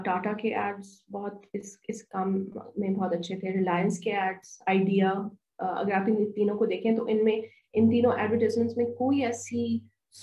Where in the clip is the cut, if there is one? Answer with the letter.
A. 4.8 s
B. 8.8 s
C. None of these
C